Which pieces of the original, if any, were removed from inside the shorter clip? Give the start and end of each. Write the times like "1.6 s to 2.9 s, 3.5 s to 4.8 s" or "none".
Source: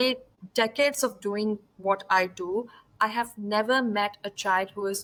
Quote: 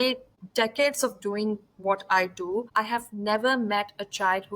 2.7 s to 2.9 s